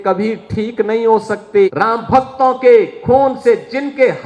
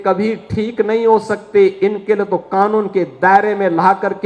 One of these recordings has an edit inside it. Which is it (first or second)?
first